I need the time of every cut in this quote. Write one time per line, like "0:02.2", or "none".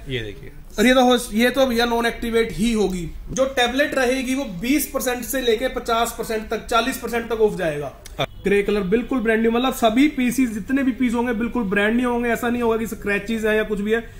0:03.2
0:08.3